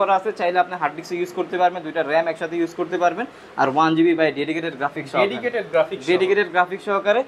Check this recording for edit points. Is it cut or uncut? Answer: uncut